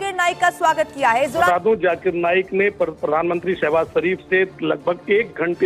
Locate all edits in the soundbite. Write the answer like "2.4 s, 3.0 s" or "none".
1.5 s